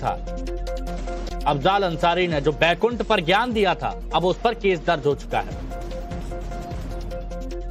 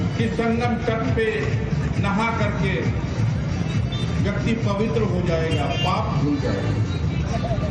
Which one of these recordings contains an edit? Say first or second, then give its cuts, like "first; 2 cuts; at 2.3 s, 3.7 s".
first; 1 cut; at 5.7 s